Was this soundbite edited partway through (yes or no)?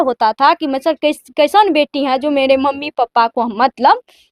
no